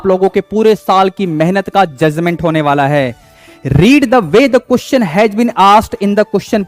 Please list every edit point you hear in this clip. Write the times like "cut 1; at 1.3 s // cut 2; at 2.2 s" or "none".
cut 1; at 3.3 s